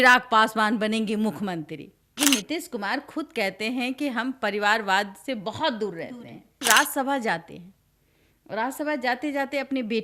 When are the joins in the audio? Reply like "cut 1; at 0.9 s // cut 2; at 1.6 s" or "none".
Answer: cut 1; at 2.0 s // cut 2; at 6.6 s